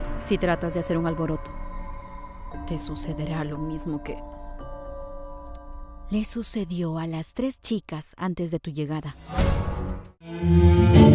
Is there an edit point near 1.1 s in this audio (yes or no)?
no